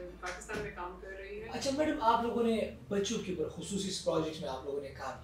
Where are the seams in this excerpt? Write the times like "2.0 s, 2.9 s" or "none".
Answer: 1.5 s